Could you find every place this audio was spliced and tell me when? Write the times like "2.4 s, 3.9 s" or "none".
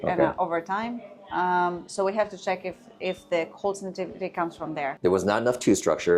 5.0 s